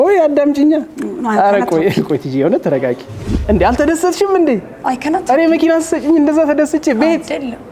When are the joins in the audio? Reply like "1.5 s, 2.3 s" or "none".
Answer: 3.3 s